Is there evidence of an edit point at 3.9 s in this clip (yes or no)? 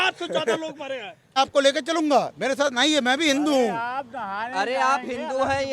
no